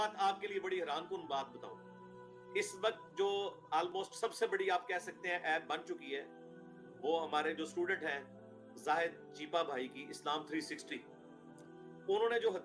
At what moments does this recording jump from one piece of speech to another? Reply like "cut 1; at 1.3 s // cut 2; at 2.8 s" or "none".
none